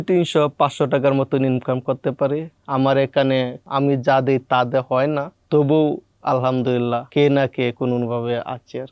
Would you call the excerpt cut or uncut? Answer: cut